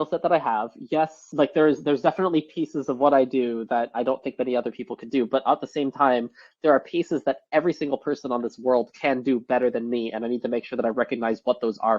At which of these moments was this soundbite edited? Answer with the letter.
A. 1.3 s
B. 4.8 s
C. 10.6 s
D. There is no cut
A